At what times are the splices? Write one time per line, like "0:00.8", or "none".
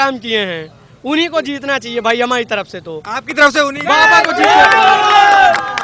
none